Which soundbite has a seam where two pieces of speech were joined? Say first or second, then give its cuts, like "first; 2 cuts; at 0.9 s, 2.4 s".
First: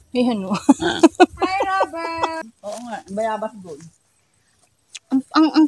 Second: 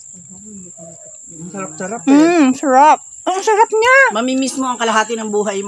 first; 1 cut; at 2.4 s